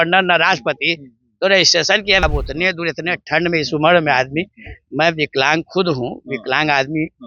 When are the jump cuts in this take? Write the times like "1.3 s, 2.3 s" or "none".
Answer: 2.2 s